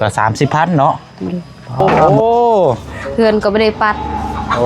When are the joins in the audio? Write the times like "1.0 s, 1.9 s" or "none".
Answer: 1.8 s